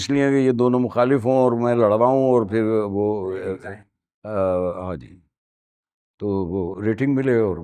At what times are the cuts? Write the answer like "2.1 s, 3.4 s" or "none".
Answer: none